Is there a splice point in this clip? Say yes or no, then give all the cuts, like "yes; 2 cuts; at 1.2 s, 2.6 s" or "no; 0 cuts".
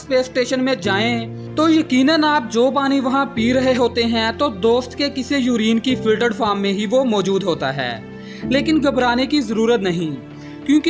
no; 0 cuts